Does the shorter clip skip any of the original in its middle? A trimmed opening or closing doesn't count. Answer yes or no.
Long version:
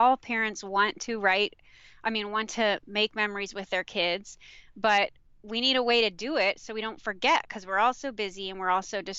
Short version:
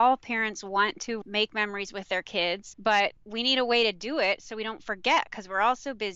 yes